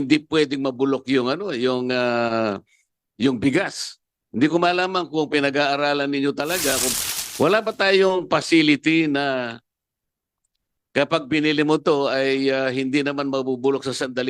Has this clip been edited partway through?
yes; 1 cut; at 6.9 s

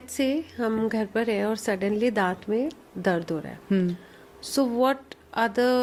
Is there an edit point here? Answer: no; 0 cuts

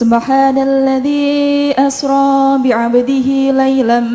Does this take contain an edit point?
no; 0 cuts

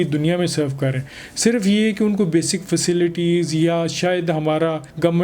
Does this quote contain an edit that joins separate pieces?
no; 0 cuts

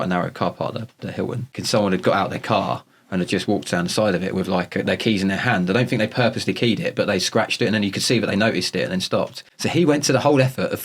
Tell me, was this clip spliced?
yes; 2 cuts; at 1.6 s, 9.4 s

